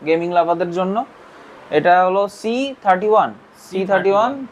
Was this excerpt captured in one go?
yes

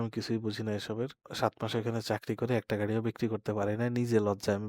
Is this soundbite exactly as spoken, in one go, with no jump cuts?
no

